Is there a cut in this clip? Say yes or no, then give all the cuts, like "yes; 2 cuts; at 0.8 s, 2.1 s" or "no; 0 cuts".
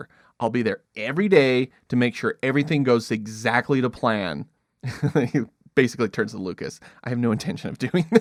no; 0 cuts